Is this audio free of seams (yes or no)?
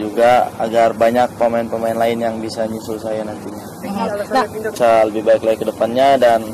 no